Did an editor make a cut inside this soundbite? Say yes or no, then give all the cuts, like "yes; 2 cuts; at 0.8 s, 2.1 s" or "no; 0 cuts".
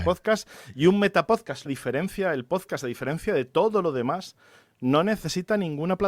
yes; 1 cut; at 1.7 s